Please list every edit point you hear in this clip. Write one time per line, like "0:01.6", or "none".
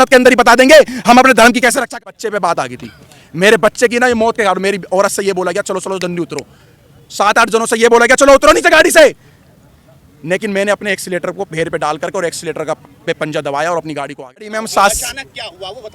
0:02.0
0:14.5